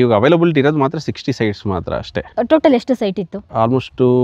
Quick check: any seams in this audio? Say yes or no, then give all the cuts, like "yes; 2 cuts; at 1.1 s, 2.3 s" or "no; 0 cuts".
no; 0 cuts